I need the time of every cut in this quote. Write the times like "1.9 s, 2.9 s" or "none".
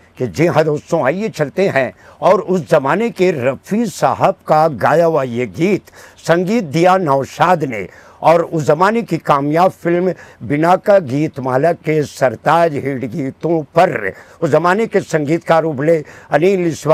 none